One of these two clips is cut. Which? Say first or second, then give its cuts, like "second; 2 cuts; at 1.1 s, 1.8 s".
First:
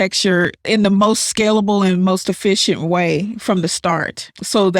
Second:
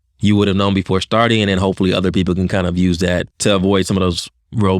second; 1 cut; at 3.3 s